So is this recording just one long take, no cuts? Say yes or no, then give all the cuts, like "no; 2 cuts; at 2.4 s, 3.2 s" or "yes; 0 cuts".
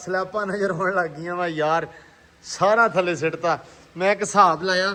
yes; 0 cuts